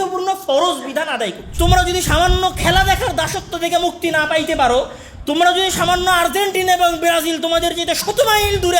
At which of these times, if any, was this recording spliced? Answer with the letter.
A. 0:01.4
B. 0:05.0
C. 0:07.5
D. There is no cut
A